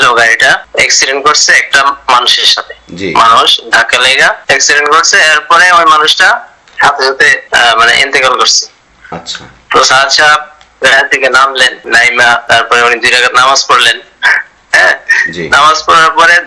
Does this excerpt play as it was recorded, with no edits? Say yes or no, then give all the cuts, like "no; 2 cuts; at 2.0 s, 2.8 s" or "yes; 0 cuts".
yes; 0 cuts